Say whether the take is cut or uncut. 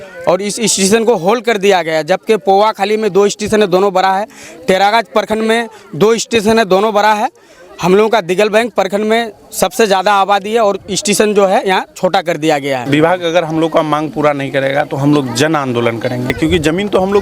cut